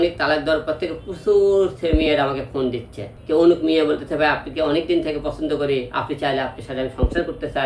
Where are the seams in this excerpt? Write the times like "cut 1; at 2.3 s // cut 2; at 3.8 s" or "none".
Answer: cut 1; at 3.1 s